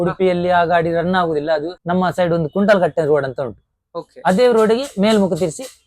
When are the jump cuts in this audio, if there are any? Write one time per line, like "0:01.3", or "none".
0:01.8

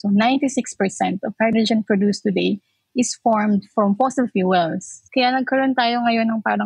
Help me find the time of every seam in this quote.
0:04.9

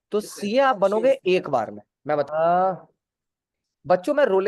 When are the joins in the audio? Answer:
0:02.3

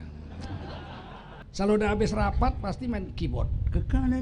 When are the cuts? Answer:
0:01.4

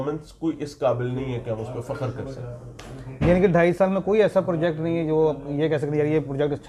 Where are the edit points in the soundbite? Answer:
none

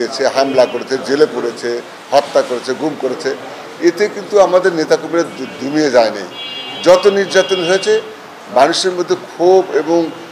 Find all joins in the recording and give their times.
none

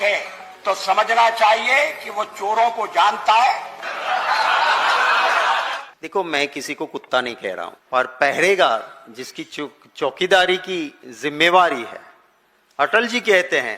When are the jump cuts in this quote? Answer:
0:05.9
0:07.8

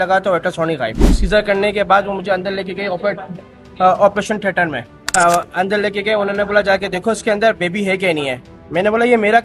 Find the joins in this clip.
0:01.2

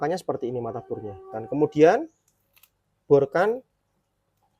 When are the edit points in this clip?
0:01.3

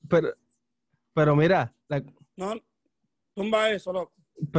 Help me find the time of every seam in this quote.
0:01.8

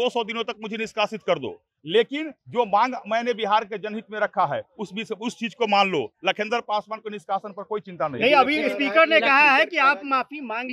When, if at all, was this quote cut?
none

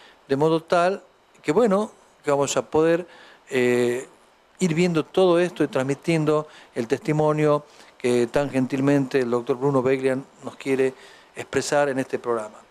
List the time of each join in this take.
0:09.1

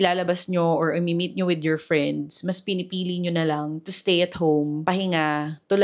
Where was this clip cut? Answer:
none

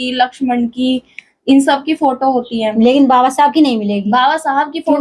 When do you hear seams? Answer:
none

